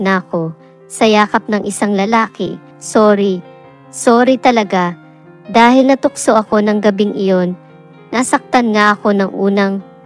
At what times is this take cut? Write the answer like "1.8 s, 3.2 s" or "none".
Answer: 2.8 s, 7.8 s